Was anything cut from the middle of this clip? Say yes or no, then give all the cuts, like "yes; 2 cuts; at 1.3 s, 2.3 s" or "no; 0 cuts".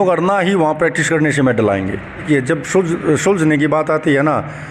yes; 1 cut; at 2.2 s